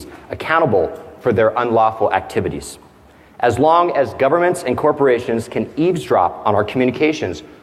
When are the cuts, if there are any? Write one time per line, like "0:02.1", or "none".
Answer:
none